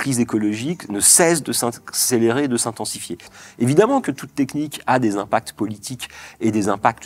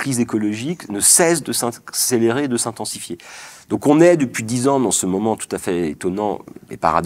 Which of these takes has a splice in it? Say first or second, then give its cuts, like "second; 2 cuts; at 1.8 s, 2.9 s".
first; 1 cut; at 3.4 s